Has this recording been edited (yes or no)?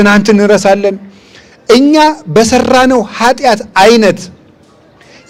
no